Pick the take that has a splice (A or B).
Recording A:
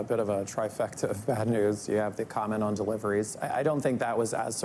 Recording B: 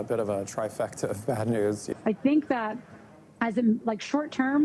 B